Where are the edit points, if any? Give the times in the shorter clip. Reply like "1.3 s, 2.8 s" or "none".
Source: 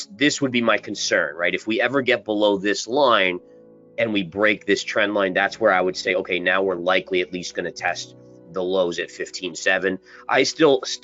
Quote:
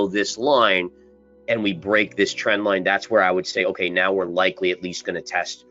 none